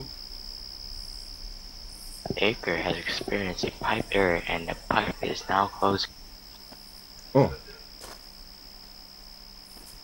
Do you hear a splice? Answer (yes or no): no